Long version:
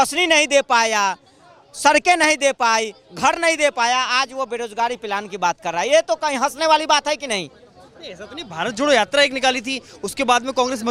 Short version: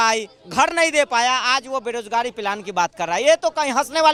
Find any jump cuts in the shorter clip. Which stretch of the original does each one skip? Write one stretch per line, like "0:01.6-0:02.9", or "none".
none